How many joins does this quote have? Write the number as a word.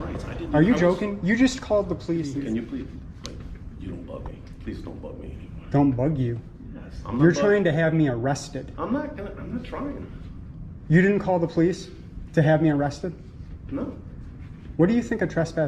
one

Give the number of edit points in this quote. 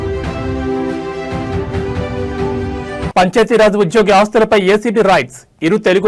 one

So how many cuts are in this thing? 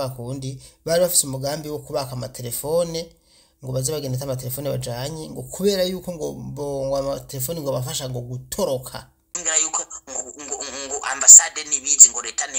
one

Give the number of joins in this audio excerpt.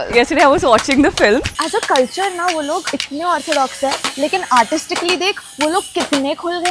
two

